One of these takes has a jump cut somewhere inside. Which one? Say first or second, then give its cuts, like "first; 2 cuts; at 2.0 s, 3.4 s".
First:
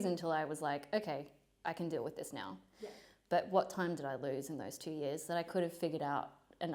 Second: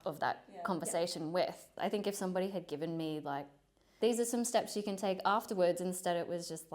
second; 2 cuts; at 1.7 s, 3.9 s